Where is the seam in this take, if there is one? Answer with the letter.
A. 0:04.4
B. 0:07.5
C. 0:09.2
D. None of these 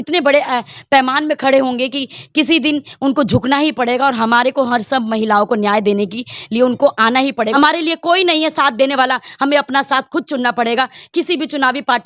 B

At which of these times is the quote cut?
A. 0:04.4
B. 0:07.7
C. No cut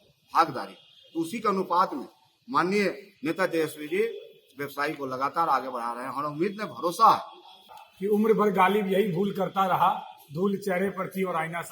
B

